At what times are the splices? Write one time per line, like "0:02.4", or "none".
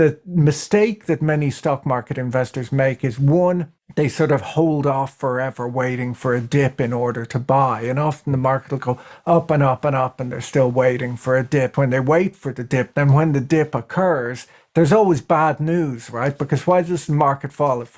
0:11.7